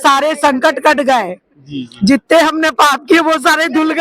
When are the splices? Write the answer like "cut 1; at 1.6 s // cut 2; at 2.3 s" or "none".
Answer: none